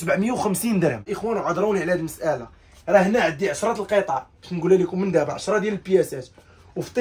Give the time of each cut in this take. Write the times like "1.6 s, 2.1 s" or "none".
1.1 s